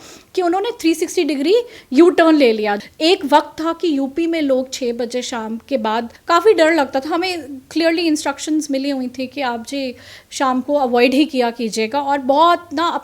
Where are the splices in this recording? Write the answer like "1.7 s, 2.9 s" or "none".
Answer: 2.8 s, 6.1 s